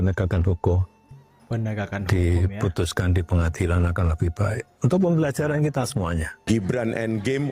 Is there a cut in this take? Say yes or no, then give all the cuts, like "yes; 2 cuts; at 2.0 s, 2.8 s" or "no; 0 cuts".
yes; 1 cut; at 6.3 s